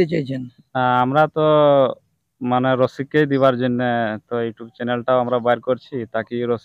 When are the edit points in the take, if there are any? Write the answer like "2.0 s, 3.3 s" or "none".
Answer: none